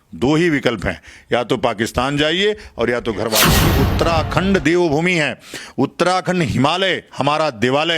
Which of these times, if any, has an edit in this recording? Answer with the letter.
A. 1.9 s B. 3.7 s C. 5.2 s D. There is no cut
B